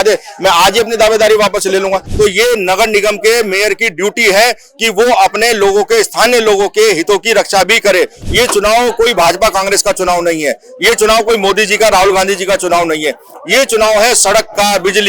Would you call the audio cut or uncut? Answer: cut